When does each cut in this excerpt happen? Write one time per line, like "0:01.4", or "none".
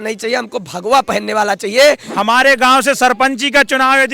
0:02.1